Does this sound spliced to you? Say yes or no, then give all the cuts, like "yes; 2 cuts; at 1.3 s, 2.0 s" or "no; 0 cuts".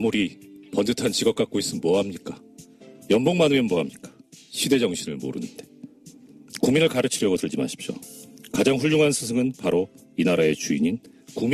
yes; 1 cut; at 6.5 s